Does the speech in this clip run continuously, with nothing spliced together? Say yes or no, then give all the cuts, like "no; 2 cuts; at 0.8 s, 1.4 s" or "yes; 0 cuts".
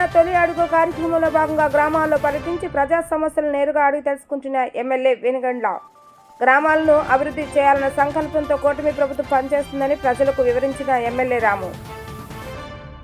yes; 0 cuts